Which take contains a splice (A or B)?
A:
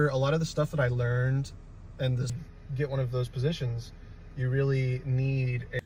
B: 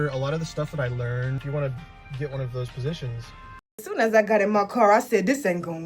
B